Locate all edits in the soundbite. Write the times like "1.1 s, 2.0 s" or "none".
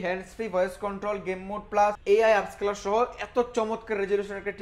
2.0 s